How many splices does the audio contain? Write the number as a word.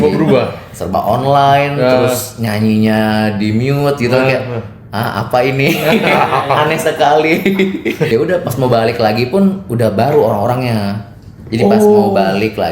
one